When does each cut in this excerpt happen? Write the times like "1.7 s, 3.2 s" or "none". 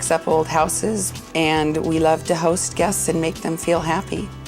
1.1 s